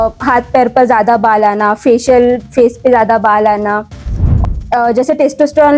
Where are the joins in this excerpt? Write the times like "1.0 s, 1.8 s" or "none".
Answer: 4.2 s